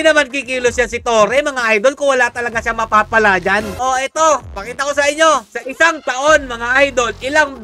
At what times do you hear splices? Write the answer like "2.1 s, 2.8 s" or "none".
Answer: 3.8 s